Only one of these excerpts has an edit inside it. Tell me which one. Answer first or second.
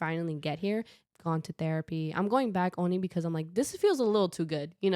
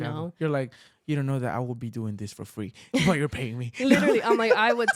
first